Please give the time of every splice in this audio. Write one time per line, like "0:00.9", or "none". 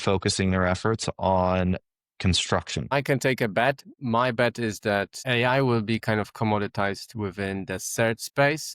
0:02.9
0:03.9
0:05.2